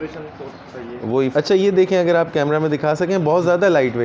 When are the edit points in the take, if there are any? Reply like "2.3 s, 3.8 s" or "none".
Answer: 1.3 s